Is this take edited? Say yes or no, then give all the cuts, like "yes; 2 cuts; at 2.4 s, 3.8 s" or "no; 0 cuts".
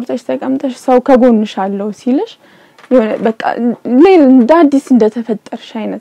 no; 0 cuts